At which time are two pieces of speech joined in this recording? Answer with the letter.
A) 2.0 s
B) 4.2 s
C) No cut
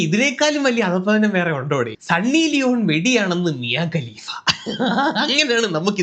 A